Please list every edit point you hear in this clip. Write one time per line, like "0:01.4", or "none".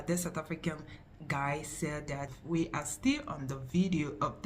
0:02.3